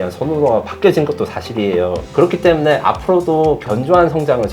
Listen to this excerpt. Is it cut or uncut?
cut